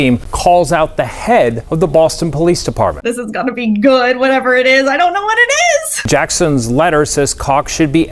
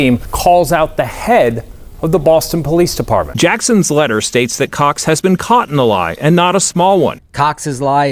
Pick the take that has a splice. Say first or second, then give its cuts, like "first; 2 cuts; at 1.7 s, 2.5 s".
first; 3 cuts; at 1.6 s, 3.0 s, 6.1 s